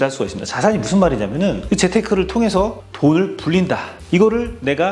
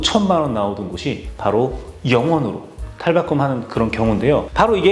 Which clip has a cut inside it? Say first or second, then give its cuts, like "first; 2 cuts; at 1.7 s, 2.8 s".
first; 2 cuts; at 1.6 s, 3.9 s